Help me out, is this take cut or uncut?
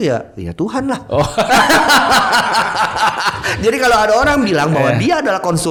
uncut